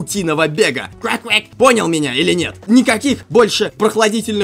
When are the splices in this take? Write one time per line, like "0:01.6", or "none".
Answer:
0:01.1
0:02.5
0:03.5